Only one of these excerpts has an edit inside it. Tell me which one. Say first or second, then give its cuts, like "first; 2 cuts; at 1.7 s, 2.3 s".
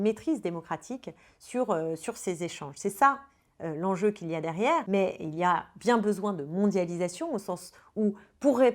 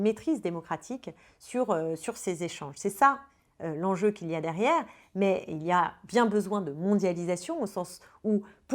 first; 1 cut; at 4.8 s